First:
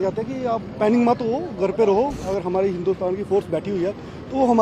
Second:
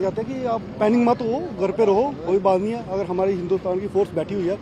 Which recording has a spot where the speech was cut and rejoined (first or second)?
first